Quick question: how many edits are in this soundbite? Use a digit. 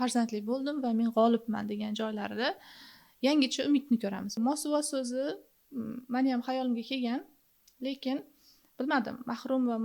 1